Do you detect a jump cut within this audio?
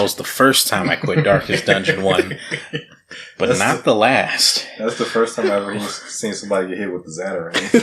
no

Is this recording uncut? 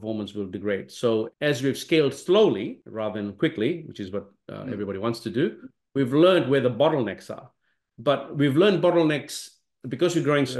yes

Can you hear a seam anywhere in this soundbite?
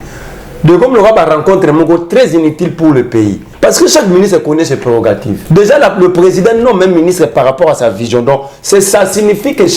yes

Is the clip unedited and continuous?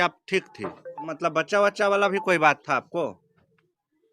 no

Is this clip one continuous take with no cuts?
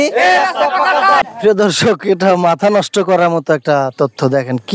no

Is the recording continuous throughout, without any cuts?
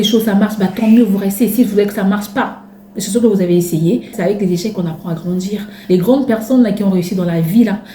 no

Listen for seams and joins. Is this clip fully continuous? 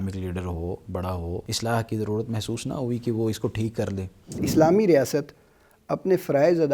no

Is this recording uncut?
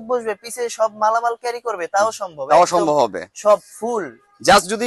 yes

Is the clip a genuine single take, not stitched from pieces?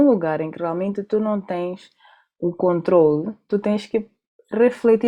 yes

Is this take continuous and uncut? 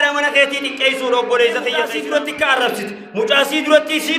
no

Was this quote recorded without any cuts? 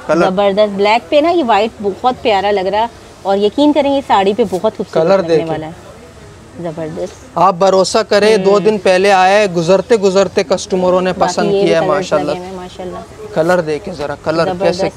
yes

